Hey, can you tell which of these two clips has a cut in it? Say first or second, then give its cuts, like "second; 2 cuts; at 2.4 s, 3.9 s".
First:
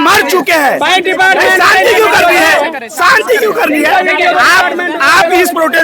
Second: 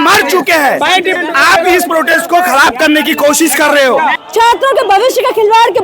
second; 2 cuts; at 1.2 s, 4.2 s